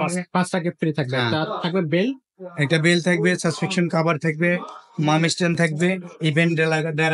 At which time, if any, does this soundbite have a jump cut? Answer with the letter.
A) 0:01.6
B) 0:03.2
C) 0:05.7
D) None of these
D